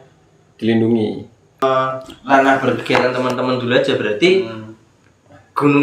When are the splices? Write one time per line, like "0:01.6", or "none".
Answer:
0:01.6